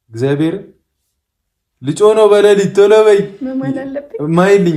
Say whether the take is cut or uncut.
uncut